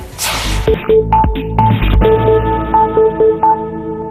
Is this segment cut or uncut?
uncut